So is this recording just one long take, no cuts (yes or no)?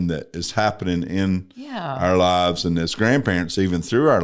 yes